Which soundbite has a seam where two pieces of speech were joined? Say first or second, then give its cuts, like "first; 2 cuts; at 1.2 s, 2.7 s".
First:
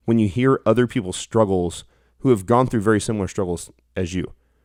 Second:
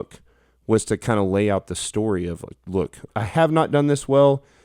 second; 1 cut; at 3.1 s